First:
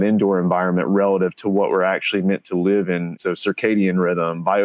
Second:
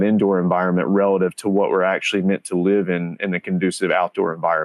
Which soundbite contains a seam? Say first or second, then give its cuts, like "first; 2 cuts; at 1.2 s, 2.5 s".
first; 1 cut; at 3.1 s